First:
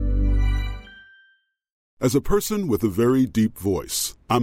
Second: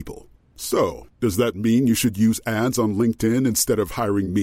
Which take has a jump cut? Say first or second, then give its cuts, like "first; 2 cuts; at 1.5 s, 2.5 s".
first; 1 cut; at 1.8 s